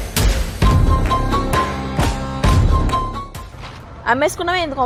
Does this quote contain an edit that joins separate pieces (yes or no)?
no